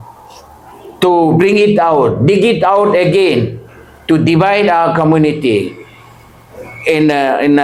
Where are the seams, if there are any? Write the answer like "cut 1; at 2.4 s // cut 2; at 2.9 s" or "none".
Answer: none